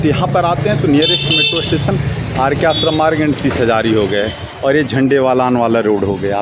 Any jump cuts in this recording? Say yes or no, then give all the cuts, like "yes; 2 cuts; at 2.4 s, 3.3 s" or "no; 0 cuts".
no; 0 cuts